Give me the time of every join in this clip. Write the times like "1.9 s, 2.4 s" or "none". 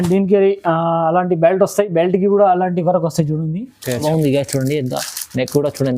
4.0 s